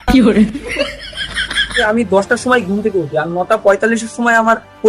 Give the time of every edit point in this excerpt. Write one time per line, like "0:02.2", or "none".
0:01.8